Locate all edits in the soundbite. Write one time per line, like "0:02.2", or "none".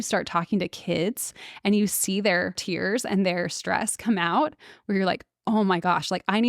0:02.6